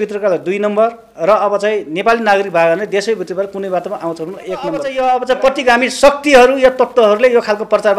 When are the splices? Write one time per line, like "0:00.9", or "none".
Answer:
0:04.9